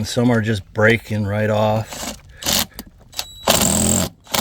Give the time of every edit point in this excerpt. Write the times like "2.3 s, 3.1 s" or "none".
none